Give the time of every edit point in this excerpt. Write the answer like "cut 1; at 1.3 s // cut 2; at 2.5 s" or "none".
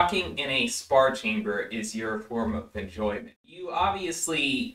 cut 1; at 3.3 s